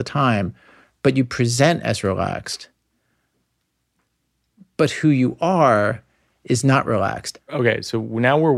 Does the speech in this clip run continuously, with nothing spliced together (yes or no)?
no